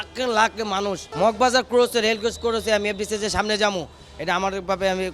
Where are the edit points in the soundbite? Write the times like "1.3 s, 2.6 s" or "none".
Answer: 1.0 s